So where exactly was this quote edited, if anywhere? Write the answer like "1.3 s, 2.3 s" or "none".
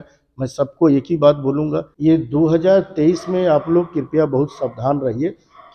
1.9 s